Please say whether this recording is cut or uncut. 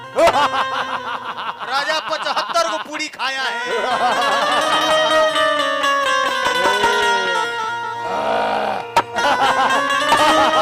uncut